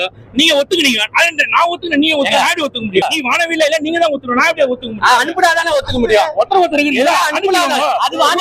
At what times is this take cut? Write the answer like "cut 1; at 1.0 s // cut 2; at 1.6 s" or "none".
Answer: none